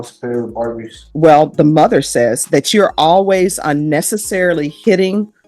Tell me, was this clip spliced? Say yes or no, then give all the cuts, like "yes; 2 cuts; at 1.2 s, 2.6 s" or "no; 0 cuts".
yes; 1 cut; at 1.0 s